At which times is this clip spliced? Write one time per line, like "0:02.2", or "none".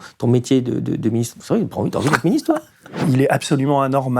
0:03.0